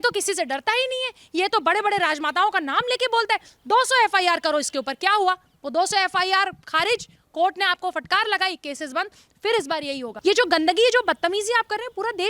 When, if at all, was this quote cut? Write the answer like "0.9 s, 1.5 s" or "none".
10.1 s